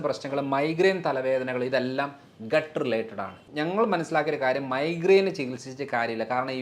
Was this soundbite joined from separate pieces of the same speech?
yes; 1 cut; at 3.4 s

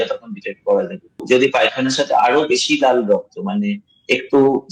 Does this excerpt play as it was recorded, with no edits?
no; 1 cut; at 1.2 s

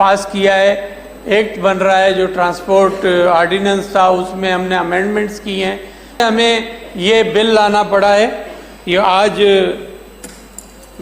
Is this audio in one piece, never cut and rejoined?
no; 1 cut; at 6.2 s

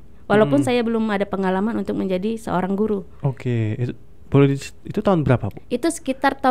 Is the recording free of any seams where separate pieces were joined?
yes; 0 cuts

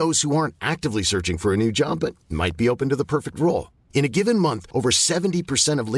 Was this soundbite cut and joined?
no; 0 cuts

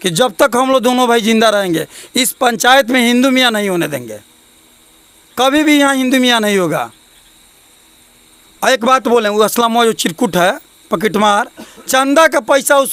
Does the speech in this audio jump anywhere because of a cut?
no; 0 cuts

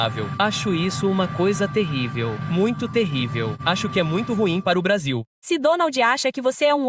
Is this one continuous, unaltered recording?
no; 2 cuts; at 3.6 s, 5.3 s

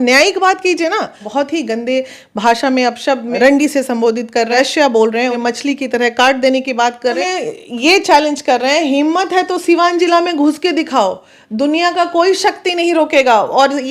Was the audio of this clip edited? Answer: yes; 5 cuts; at 1.2 s, 3.3 s, 4.5 s, 5.3 s, 7.2 s

